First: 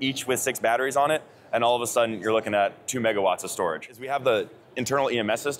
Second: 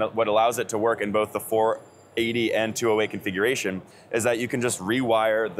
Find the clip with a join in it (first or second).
first